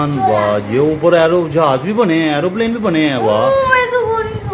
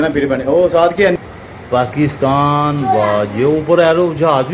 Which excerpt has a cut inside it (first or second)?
second